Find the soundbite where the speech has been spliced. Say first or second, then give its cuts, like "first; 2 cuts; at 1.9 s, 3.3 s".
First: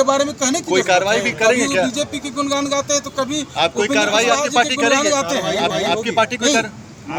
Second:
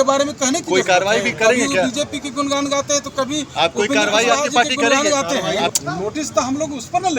second; 1 cut; at 5.7 s